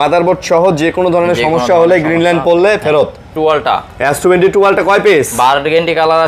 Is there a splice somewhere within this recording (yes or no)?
yes